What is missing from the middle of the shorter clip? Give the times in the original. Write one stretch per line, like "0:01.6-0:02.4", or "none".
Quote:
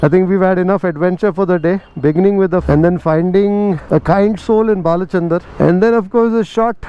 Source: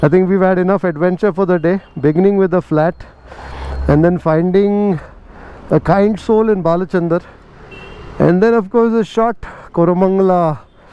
0:02.6-0:03.8
0:05.0-0:05.6
0:07.3-0:08.1